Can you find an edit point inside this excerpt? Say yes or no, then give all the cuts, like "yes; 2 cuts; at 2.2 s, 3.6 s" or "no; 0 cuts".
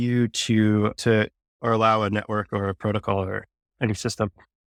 no; 0 cuts